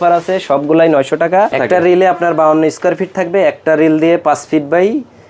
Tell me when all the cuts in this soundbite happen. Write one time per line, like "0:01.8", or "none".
0:01.5